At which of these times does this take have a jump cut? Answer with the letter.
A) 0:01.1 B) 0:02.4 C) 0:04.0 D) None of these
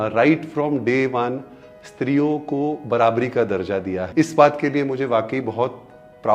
C